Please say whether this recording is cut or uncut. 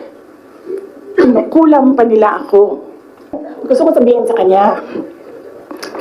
cut